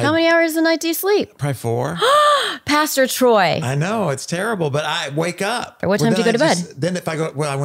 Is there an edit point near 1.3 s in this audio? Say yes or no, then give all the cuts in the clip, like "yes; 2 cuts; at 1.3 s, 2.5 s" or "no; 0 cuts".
no; 1 cut; at 5.8 s